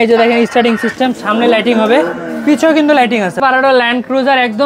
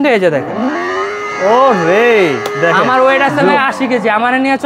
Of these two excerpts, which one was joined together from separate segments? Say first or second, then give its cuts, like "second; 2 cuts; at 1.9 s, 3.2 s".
first; 1 cut; at 3.4 s